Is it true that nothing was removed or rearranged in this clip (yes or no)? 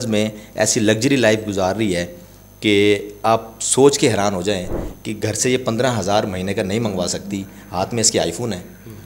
yes